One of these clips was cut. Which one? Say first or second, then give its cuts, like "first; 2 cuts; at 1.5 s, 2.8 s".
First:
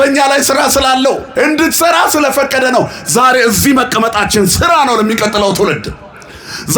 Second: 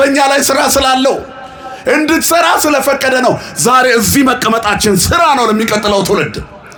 first; 1 cut; at 1.3 s